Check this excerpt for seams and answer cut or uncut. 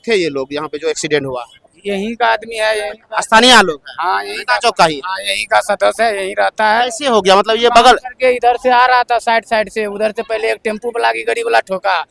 uncut